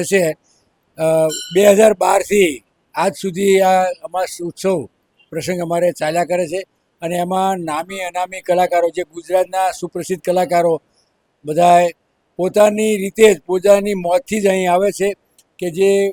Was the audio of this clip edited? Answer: no; 0 cuts

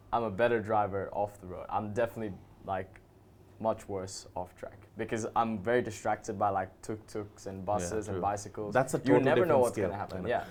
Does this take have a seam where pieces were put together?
no; 0 cuts

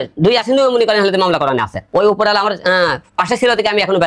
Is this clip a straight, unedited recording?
no; 1 cut; at 1.8 s

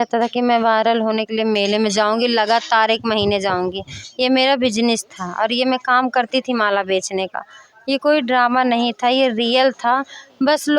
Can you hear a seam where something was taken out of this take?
no; 0 cuts

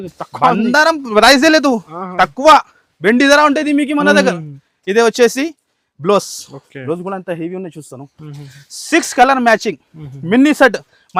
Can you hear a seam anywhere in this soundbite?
no; 0 cuts

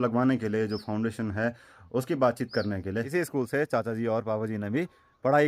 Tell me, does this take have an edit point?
yes; 1 cut; at 3.1 s

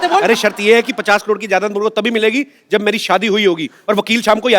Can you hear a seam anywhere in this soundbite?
no; 0 cuts

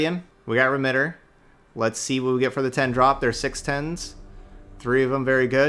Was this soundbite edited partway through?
no; 0 cuts

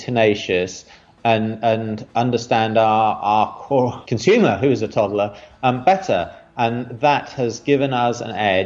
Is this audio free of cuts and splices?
no; 1 cut; at 4.0 s

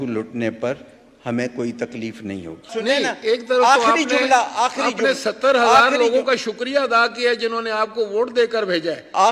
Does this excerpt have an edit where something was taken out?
yes; 1 cut; at 2.7 s

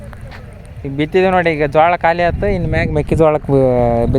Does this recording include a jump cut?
no; 0 cuts

